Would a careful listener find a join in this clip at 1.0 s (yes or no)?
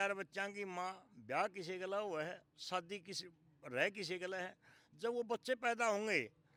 no